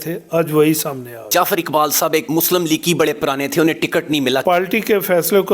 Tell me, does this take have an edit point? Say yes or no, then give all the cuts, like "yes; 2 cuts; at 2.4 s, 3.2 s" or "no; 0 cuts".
yes; 3 cuts; at 1.3 s, 2.3 s, 4.4 s